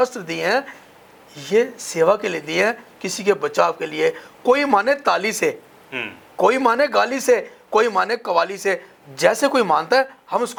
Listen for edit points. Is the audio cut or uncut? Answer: uncut